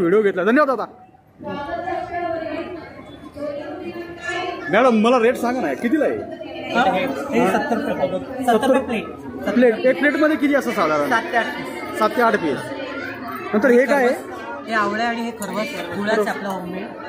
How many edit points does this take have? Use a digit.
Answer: 1